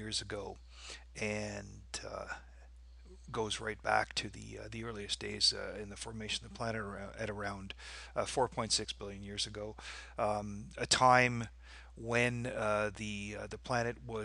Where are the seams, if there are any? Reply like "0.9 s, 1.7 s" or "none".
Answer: 5.1 s

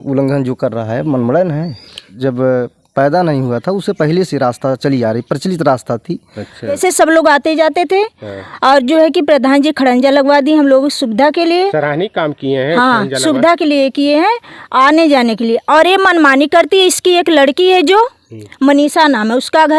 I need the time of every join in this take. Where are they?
2.1 s, 6.8 s

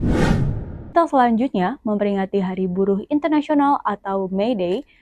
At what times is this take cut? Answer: 0.9 s

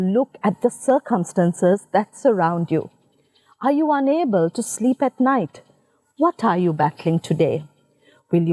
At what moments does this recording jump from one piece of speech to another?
none

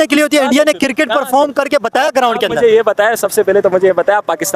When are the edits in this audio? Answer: none

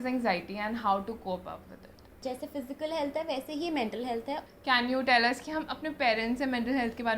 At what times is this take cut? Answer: 2.2 s, 4.4 s

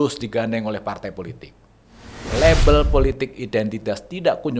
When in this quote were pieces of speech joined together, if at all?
2.3 s

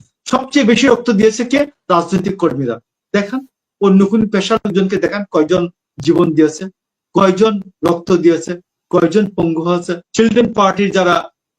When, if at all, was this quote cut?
10.0 s

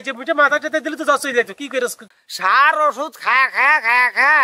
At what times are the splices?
none

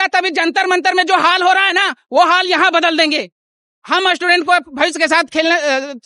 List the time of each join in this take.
none

